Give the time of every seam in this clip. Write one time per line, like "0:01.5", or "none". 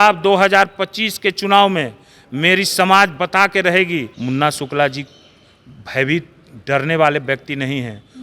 0:04.1